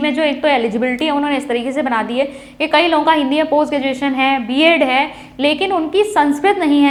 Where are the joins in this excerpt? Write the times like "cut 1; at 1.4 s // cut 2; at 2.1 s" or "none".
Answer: none